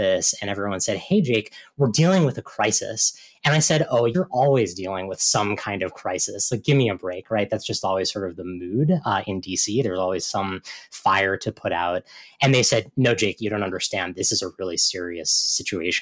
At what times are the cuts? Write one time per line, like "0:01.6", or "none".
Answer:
0:04.1
0:14.2